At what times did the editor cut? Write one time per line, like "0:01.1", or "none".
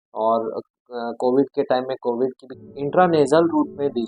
0:02.6